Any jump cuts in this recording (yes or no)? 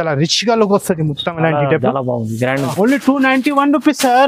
yes